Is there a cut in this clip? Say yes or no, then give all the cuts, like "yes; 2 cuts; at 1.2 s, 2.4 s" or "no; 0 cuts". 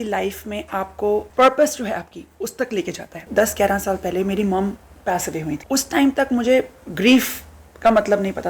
yes; 3 cuts; at 1.3 s, 3.3 s, 5.6 s